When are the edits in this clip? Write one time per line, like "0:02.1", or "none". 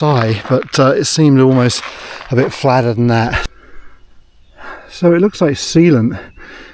0:03.4